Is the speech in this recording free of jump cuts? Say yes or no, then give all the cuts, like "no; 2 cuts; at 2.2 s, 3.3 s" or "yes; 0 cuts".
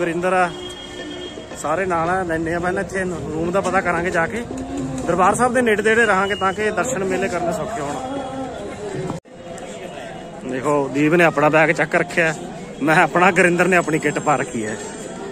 no; 1 cut; at 9.3 s